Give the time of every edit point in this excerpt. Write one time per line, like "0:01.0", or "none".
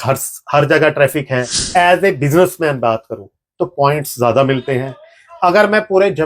0:01.6